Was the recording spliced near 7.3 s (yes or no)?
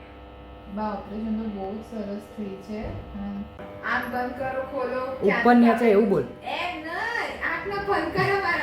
no